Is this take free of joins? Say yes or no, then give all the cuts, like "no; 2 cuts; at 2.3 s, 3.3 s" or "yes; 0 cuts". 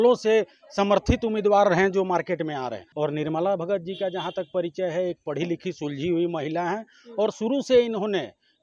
no; 1 cut; at 2.8 s